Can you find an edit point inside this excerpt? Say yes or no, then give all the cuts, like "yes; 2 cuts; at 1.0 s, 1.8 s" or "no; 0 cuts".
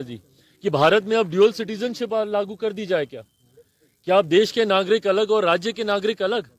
no; 0 cuts